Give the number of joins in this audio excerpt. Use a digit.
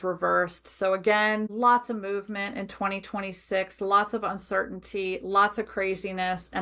1